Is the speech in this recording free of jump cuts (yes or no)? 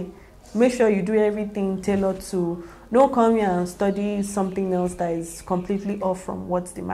yes